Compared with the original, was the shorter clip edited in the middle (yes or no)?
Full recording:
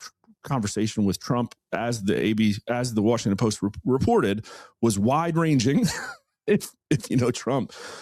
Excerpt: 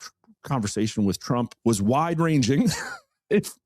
yes